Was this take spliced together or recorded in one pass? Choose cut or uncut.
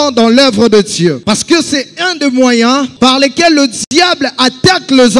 cut